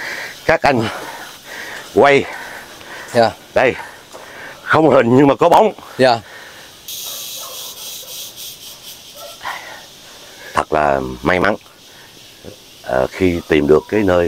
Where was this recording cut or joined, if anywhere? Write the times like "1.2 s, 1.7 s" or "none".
7.0 s